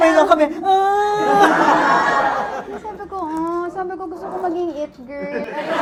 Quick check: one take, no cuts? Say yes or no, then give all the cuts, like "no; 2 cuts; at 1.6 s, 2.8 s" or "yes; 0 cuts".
yes; 0 cuts